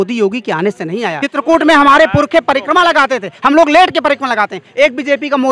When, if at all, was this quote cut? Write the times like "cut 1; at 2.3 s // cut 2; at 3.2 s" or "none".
cut 1; at 1.2 s